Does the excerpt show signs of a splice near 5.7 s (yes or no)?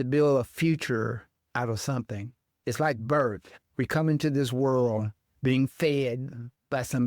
no